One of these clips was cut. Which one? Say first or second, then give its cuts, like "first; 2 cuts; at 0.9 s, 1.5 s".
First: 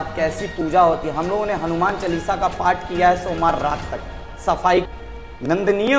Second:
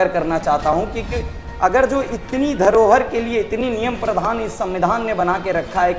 first; 1 cut; at 4.9 s